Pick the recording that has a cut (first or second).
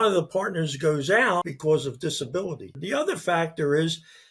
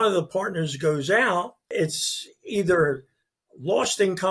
first